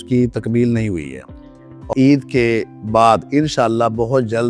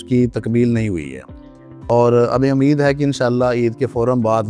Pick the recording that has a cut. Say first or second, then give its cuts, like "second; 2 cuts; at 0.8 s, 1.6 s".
first; 1 cut; at 1.9 s